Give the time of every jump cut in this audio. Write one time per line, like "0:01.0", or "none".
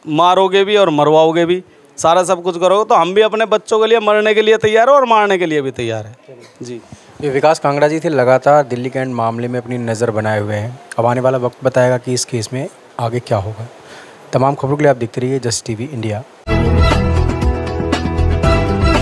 none